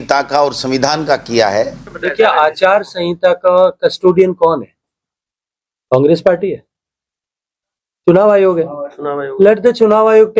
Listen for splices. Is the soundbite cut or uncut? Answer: cut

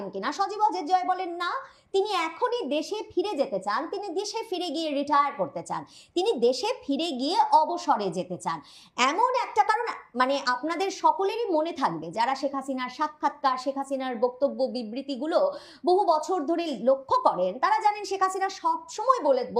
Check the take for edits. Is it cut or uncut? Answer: uncut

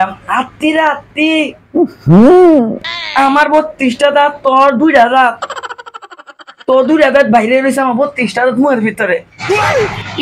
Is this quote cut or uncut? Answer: uncut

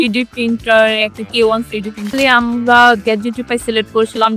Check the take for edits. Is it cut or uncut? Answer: cut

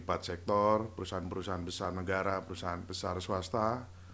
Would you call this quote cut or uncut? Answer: uncut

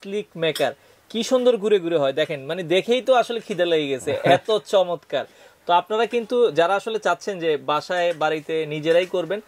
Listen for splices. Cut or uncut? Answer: uncut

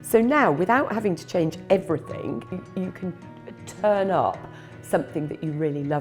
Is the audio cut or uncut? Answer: cut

